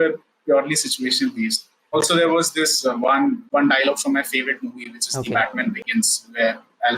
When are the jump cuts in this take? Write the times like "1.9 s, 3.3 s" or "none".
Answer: 1.9 s, 3.4 s